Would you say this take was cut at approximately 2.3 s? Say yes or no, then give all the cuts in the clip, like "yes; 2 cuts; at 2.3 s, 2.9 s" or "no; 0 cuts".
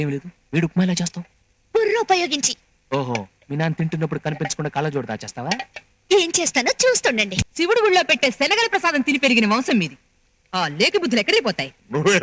no; 1 cut; at 7.4 s